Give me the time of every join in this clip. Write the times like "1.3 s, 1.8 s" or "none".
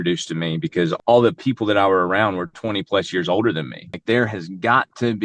0.9 s, 2.5 s, 4.0 s